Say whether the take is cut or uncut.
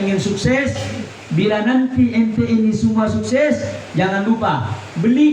uncut